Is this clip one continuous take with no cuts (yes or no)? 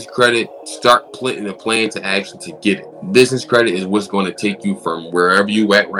no